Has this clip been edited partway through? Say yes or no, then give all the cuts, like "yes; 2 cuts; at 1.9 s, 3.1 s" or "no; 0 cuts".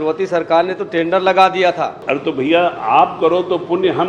yes; 1 cut; at 2.0 s